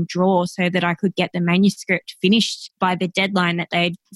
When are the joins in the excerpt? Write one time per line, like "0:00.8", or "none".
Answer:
0:02.6